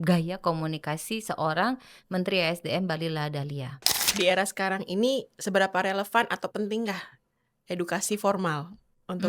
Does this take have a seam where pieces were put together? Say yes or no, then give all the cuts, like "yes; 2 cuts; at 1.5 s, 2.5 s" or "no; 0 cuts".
yes; 1 cut; at 4.1 s